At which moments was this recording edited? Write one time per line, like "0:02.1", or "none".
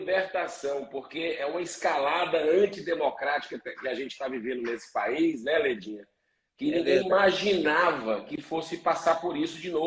none